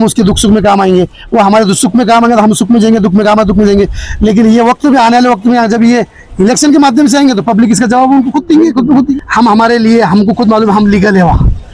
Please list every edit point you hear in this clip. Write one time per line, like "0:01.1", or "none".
0:09.1